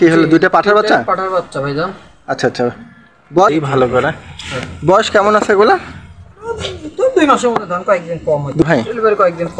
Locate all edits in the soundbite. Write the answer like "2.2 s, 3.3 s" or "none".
3.5 s, 8.6 s